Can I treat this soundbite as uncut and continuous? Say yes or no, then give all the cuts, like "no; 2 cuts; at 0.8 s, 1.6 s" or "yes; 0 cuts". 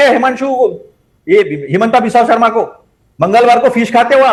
yes; 0 cuts